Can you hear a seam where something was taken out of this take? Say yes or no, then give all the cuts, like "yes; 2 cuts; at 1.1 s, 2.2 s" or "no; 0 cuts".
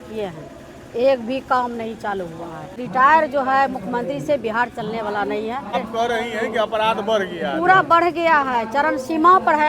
yes; 2 cuts; at 2.8 s, 5.7 s